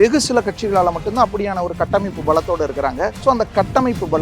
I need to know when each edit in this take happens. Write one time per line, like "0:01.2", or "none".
0:03.2